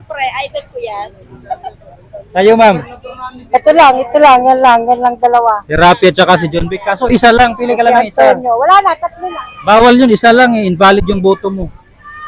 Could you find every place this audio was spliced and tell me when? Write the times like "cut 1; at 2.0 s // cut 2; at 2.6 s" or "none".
none